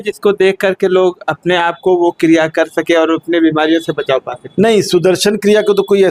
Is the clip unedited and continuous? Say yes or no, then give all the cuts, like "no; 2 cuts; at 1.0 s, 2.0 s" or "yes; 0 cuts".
yes; 0 cuts